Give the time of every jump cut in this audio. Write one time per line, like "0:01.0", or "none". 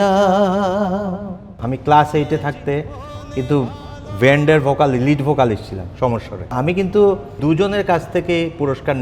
0:01.7
0:06.5
0:07.4